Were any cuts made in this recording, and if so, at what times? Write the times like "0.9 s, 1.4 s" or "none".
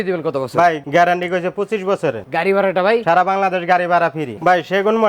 2.2 s, 4.2 s